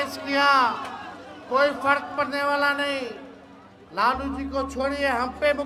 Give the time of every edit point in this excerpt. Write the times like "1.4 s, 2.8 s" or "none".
none